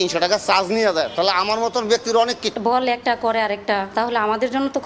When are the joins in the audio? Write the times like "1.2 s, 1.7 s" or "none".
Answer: 2.5 s